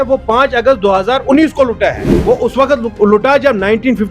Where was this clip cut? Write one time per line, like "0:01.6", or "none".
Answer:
0:02.1

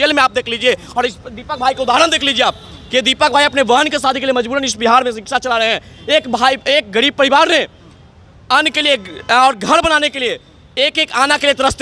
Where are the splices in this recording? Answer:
none

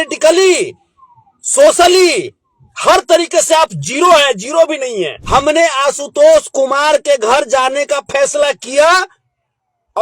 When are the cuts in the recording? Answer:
0:05.2

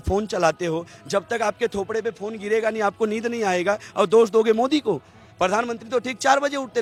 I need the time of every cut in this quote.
none

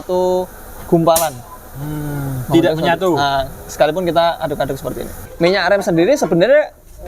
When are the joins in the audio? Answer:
0:05.2

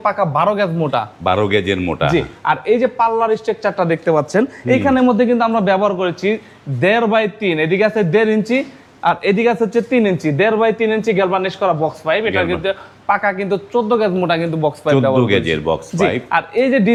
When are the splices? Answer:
none

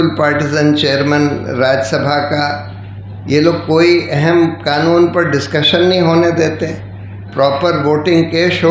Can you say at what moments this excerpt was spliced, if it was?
0:07.3

